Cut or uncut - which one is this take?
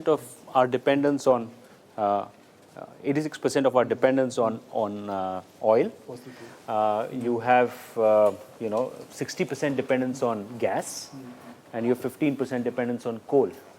cut